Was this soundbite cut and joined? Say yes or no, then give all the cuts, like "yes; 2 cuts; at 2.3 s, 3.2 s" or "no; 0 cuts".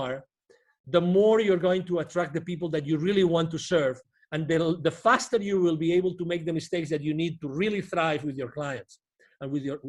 no; 0 cuts